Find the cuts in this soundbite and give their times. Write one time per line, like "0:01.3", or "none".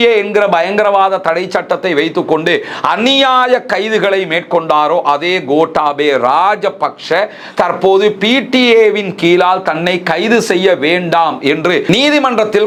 none